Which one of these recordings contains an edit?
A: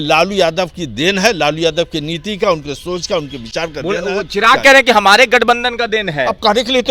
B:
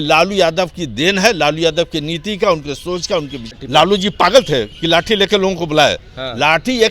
B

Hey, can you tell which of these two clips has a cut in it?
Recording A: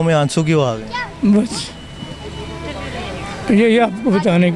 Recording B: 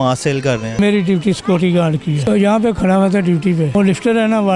B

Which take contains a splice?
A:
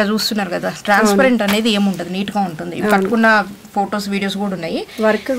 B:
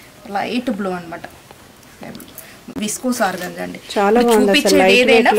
B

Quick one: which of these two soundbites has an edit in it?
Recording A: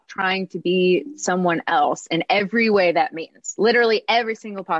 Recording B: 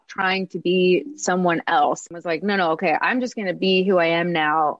B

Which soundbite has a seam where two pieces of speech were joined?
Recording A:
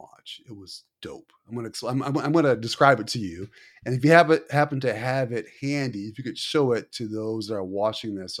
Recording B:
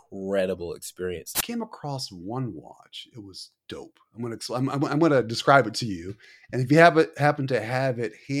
B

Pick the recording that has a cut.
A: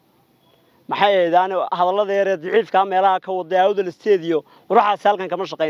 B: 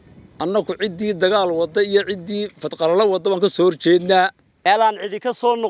B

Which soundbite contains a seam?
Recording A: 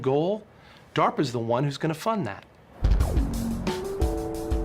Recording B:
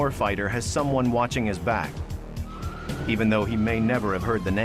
A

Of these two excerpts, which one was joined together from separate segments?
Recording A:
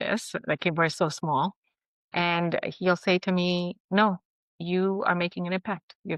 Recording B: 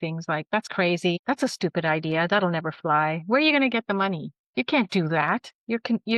B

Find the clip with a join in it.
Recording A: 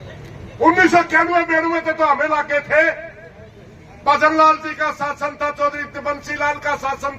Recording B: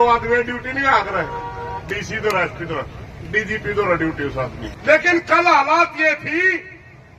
B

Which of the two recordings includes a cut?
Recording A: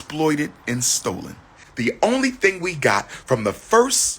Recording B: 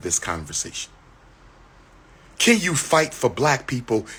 A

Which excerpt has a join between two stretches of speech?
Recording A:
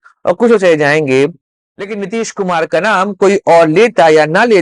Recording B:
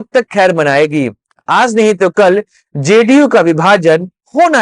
A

